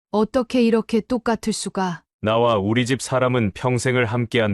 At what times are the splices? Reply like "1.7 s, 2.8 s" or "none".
2.1 s